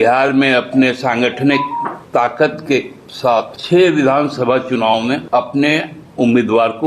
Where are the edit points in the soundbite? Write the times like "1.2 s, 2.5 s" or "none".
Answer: 2.0 s, 3.6 s, 5.2 s